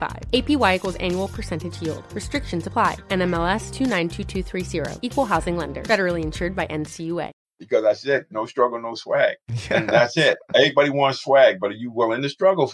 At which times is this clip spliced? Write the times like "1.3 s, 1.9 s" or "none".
7.3 s